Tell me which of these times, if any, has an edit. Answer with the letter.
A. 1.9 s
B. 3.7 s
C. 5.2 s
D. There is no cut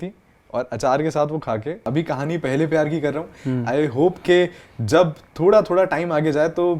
A